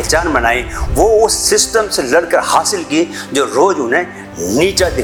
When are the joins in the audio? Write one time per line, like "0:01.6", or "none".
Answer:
none